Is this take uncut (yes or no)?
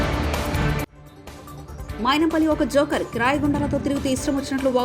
no